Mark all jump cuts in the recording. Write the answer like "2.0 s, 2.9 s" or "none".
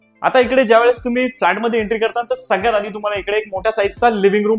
none